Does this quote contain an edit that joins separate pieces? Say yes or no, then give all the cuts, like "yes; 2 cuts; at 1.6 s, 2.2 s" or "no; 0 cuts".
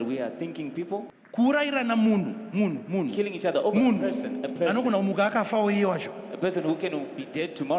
yes; 1 cut; at 1.2 s